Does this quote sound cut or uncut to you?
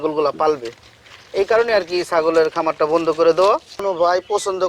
cut